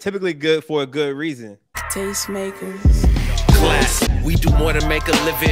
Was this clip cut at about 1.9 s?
yes; 1 cut; at 1.9 s

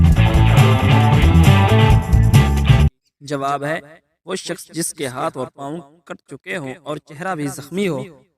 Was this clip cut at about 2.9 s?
yes; 1 cut; at 2.9 s

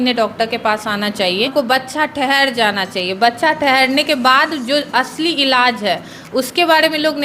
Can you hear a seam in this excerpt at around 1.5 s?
yes; 1 cut; at 1.5 s

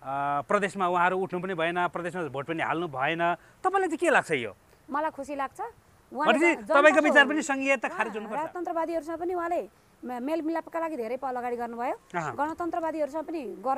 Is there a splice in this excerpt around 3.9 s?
no; 1 cut; at 8.2 s

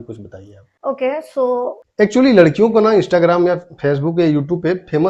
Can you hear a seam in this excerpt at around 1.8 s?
yes; 1 cut; at 1.8 s

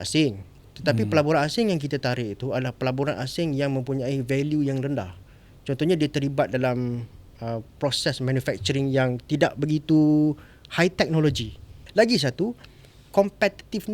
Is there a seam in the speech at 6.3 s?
no; 1 cut; at 11.8 s

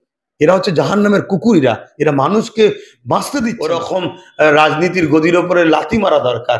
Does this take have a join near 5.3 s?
no; 1 cut; at 3.7 s

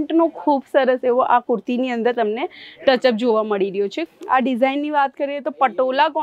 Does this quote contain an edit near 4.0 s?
yes; 1 cut; at 4.0 s

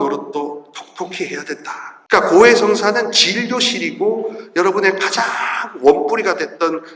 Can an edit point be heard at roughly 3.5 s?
no; 1 cut; at 1.9 s

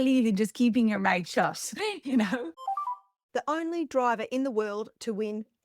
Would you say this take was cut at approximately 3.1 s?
yes; 1 cut; at 3.1 s

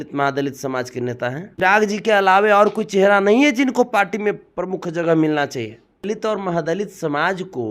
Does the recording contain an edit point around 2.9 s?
no; 2 cuts; at 1.5 s, 6.0 s

